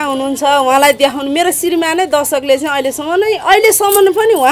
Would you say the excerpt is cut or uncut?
uncut